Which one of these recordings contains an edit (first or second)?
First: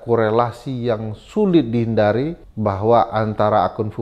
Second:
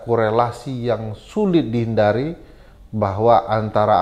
first